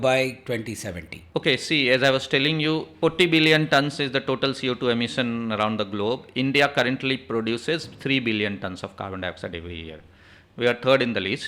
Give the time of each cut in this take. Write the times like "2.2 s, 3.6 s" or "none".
1.2 s, 2.9 s